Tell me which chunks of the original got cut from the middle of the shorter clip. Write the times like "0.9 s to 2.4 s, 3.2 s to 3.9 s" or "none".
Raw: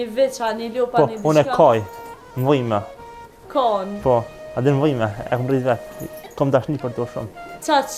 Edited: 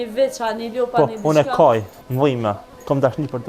2.3 s to 5.8 s